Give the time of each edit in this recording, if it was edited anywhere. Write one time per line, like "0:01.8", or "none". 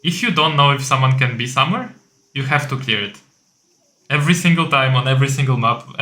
none